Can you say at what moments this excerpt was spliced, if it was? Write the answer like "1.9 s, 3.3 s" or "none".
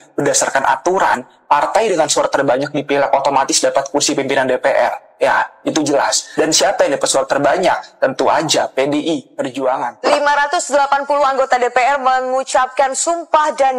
9.9 s